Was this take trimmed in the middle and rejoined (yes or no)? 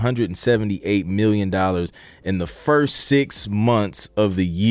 no